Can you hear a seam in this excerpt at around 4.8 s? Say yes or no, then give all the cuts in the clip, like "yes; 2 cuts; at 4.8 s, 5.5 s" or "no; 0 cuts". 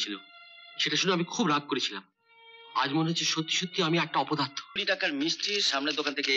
yes; 1 cut; at 4.8 s